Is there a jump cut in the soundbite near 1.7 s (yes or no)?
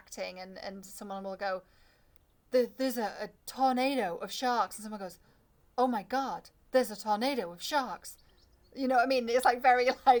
no